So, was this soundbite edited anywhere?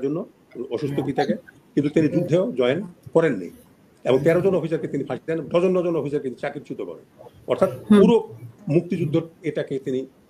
no; 0 cuts

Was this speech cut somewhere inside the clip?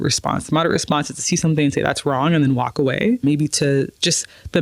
yes; 1 cut; at 3.2 s

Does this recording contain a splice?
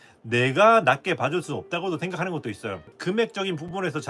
yes; 1 cut; at 2.9 s

